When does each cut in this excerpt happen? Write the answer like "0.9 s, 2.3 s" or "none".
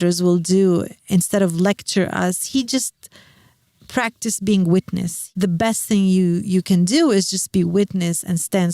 5.2 s